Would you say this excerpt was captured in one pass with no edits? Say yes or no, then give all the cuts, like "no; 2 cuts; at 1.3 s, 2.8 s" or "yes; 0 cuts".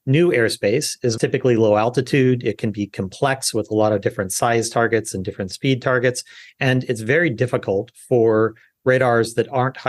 no; 1 cut; at 1.2 s